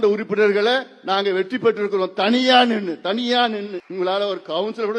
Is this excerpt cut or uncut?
cut